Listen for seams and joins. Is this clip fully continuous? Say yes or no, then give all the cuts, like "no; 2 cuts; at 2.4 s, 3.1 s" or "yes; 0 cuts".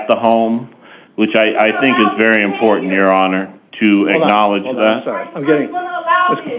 yes; 0 cuts